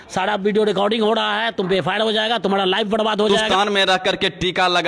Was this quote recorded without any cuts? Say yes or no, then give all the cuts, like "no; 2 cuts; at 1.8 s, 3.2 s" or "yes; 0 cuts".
no; 1 cut; at 3.4 s